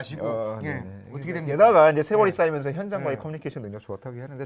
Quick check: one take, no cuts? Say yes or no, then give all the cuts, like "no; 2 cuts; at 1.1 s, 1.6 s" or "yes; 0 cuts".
yes; 0 cuts